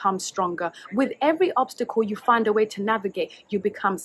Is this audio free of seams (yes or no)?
yes